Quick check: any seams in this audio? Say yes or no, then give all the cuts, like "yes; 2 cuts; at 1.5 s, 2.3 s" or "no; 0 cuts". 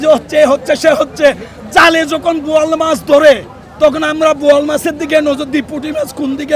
yes; 1 cut; at 1.5 s